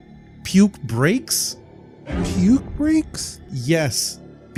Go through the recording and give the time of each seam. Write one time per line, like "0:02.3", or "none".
none